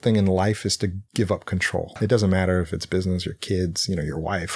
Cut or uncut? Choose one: cut